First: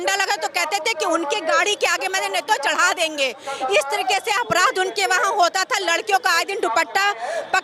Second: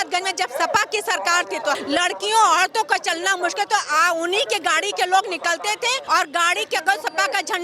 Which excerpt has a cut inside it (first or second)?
second